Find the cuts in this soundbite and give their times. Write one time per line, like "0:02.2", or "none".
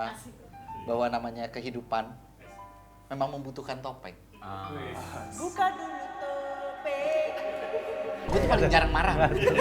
0:08.2

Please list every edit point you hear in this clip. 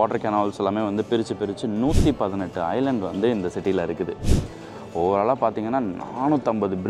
none

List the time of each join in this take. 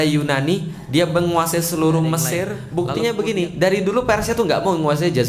0:02.6

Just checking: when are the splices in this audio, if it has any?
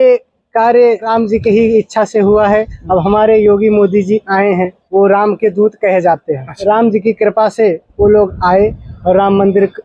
0:01.1
0:04.8
0:06.5

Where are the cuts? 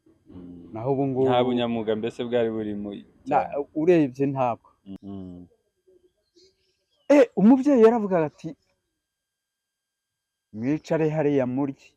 0:05.0

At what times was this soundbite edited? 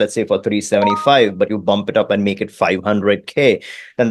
none

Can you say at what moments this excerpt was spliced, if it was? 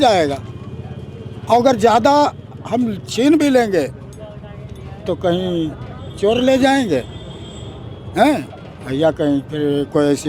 none

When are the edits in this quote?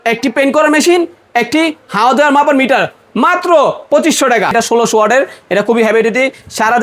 0:04.5

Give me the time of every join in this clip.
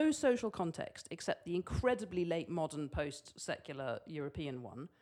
none

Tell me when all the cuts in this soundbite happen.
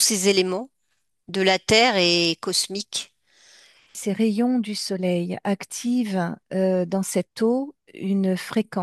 0:04.0

